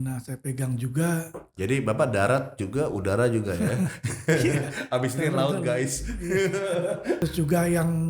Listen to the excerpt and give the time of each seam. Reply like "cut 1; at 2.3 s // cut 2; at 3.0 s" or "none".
cut 1; at 7.2 s